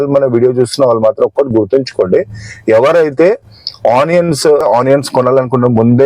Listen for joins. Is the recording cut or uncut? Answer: cut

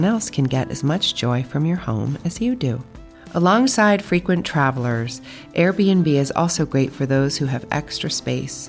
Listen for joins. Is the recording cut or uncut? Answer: uncut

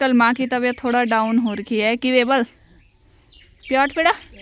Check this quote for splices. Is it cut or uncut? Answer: uncut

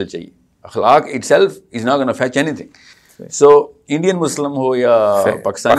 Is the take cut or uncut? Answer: uncut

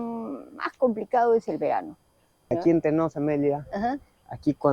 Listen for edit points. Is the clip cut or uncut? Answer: cut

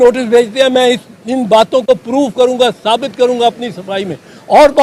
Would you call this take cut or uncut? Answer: uncut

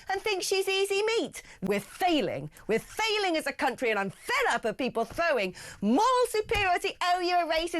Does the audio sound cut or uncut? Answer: cut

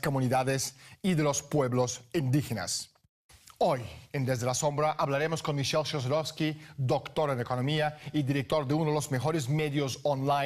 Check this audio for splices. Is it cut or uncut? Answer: cut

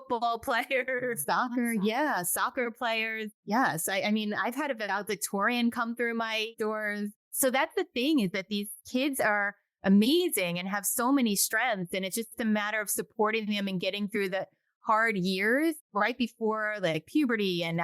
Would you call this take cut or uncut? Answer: cut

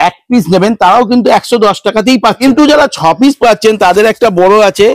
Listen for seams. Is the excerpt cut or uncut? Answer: cut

